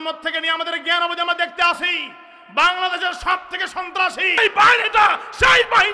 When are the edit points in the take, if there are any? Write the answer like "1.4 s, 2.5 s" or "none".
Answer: 4.4 s